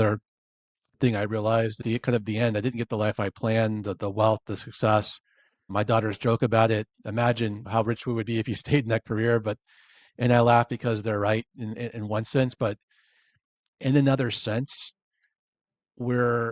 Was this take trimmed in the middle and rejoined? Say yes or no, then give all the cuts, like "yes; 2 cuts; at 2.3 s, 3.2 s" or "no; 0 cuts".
yes; 2 cuts; at 1.8 s, 7.6 s